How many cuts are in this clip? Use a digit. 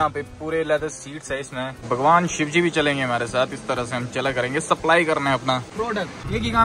2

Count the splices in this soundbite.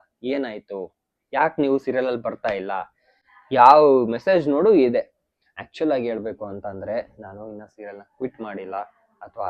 0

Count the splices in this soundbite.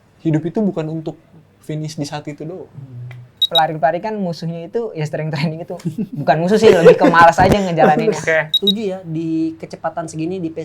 2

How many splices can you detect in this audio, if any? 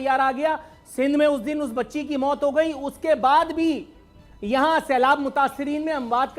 0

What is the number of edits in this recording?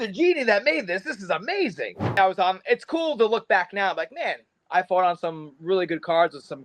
1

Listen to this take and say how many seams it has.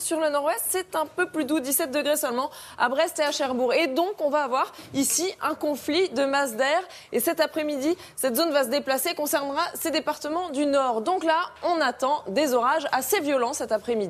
1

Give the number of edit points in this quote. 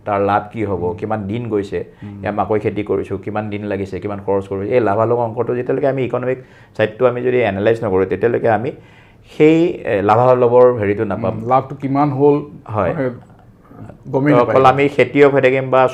0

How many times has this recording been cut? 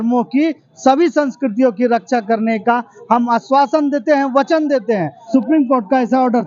1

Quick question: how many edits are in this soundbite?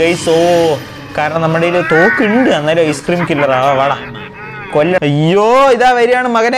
1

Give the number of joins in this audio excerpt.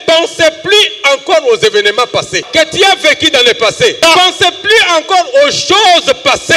2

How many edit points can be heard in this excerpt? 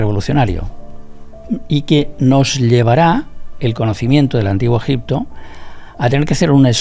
0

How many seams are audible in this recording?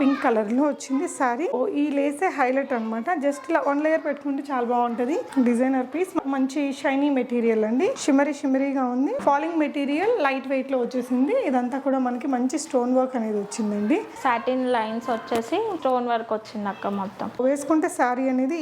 8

